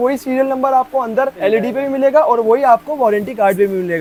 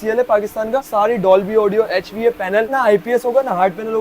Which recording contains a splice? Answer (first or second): second